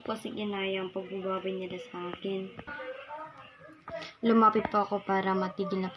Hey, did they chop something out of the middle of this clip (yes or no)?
yes